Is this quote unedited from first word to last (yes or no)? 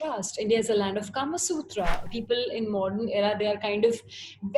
no